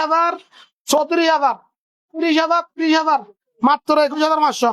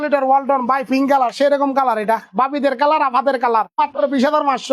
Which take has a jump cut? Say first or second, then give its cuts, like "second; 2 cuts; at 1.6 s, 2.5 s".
second; 1 cut; at 3.8 s